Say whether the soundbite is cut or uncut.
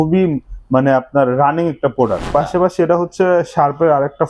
cut